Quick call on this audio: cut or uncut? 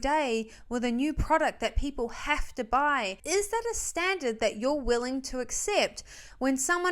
cut